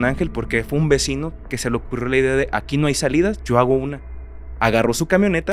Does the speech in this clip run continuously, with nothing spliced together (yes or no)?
yes